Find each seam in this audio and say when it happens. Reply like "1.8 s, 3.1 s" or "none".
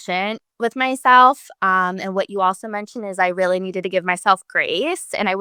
none